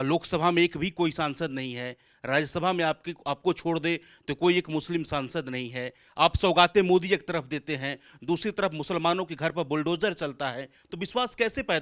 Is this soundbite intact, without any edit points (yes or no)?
yes